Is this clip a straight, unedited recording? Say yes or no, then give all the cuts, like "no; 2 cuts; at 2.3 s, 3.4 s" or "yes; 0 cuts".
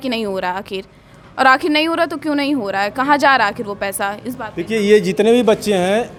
yes; 0 cuts